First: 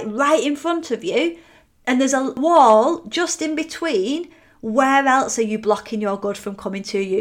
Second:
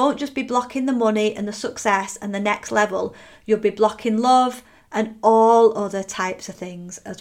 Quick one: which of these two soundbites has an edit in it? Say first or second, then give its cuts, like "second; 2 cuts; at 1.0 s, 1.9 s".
first; 1 cut; at 2.4 s